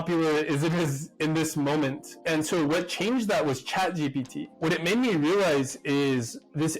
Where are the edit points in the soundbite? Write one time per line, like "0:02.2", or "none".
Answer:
0:04.6